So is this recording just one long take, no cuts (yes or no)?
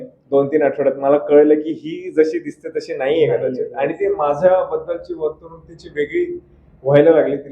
yes